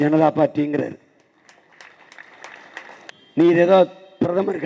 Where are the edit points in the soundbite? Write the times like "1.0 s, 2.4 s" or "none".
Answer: 3.1 s